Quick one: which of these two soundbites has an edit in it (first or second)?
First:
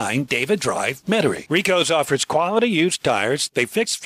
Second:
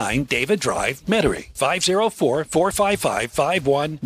second